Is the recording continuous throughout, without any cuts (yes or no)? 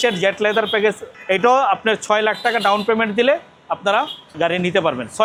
yes